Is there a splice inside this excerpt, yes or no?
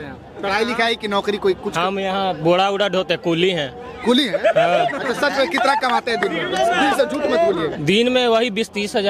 no